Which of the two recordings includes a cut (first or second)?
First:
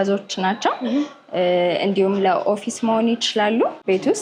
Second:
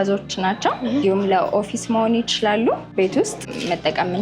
second